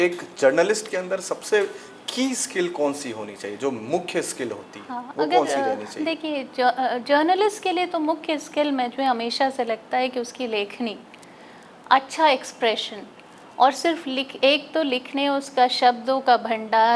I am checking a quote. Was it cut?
no; 0 cuts

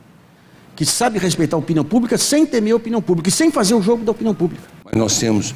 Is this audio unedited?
no; 1 cut; at 4.6 s

